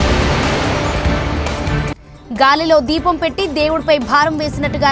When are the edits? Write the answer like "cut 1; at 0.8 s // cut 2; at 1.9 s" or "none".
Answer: none